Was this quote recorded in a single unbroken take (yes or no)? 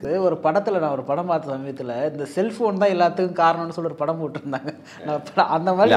yes